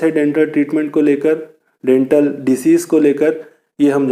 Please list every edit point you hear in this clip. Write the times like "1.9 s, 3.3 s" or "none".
none